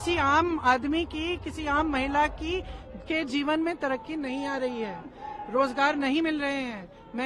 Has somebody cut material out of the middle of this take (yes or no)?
no